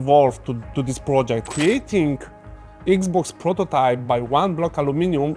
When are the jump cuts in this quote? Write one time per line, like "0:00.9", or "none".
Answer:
0:01.5

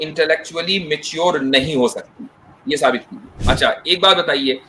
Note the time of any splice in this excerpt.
0:03.3

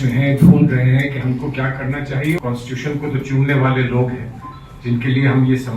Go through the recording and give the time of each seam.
0:02.4

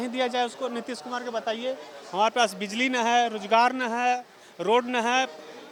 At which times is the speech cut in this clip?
none

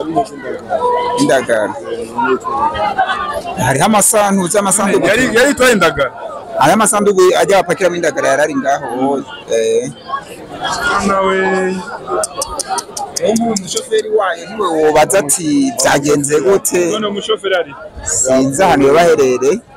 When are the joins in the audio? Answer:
none

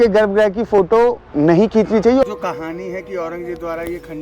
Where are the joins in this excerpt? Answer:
0:02.2

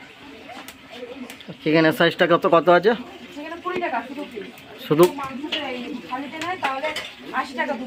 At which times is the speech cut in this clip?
none

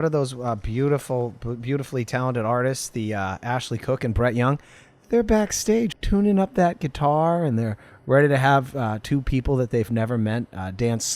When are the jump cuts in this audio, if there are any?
0:06.0

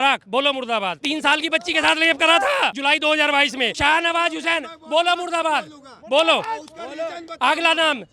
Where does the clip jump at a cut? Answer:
0:01.0
0:02.8
0:03.7

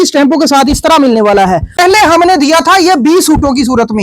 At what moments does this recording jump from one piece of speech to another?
0:01.8

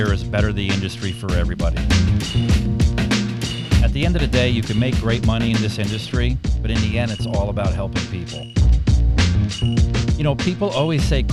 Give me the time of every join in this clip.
none

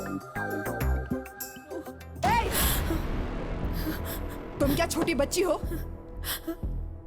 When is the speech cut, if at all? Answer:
0:02.0

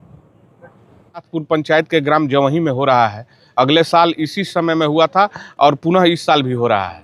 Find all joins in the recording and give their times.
0:01.2

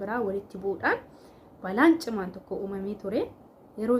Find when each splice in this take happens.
none

